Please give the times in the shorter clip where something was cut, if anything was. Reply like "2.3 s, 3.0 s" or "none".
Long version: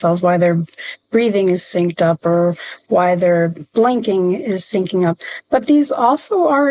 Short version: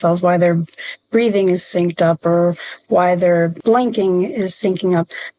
3.6 s

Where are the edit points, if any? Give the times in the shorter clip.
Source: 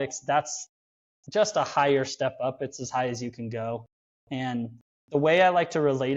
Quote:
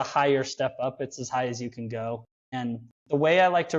2.7 s

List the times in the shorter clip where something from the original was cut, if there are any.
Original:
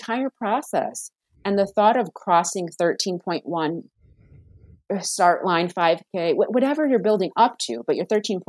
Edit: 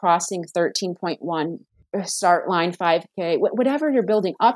1.7 s

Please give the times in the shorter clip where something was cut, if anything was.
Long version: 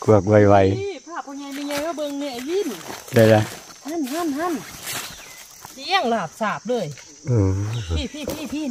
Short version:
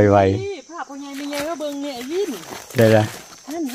none

